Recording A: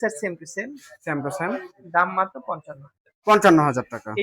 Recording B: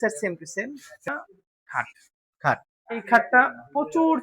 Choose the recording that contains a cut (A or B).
B